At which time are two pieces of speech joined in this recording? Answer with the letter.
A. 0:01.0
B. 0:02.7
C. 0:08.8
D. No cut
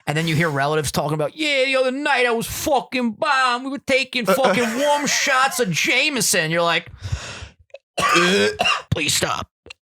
C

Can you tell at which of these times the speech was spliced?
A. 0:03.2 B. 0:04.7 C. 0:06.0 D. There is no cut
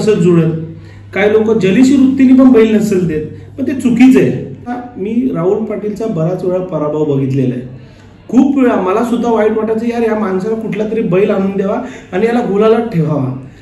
B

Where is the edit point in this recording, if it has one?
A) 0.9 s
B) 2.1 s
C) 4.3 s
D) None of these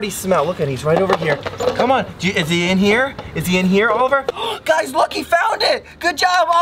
C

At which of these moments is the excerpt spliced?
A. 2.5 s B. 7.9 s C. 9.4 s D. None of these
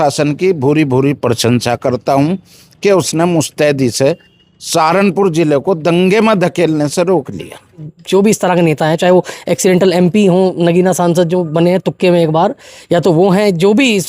B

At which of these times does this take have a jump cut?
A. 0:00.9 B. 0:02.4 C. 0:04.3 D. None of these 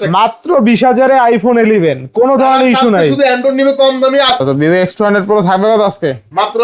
C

